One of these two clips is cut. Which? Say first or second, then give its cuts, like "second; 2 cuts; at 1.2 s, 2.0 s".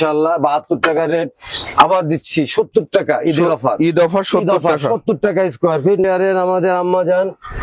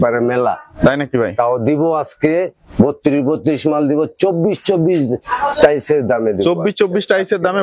first; 1 cut; at 6.0 s